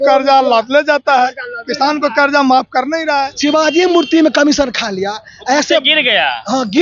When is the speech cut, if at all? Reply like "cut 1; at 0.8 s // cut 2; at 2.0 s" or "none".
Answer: cut 1; at 3.3 s